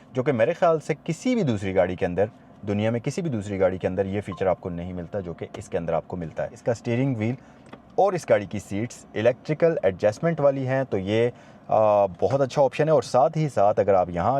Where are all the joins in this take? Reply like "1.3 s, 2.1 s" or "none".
6.6 s